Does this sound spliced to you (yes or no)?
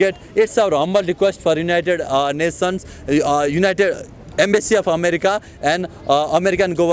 no